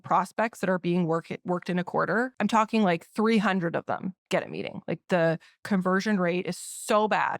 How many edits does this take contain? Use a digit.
1